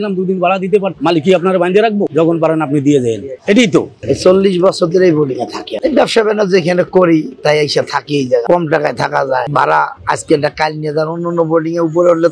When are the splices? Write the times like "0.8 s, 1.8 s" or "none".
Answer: 2.1 s, 4.0 s, 9.5 s